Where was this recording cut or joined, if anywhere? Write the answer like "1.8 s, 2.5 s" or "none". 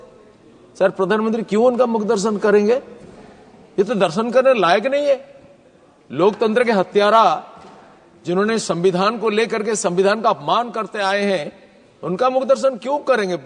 none